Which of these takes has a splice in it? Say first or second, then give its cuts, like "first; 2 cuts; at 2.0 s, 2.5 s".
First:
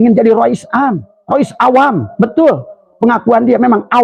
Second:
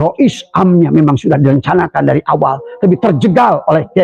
first; 1 cut; at 1.1 s